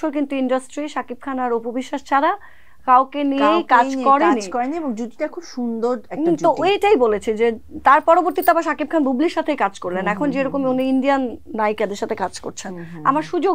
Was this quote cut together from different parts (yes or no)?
no